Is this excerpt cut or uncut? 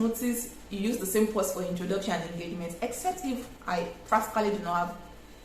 uncut